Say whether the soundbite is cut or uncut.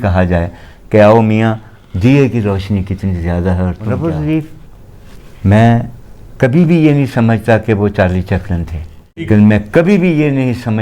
cut